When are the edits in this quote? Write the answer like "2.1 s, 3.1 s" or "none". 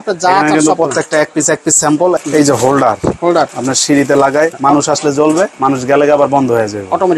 2.2 s, 3.6 s, 4.6 s, 5.5 s